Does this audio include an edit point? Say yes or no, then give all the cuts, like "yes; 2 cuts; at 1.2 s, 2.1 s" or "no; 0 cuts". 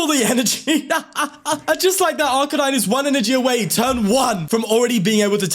yes; 2 cuts; at 1.6 s, 4.4 s